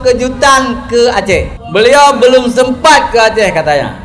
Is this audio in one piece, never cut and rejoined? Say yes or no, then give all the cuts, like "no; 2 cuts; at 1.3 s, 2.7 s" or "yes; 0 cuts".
yes; 0 cuts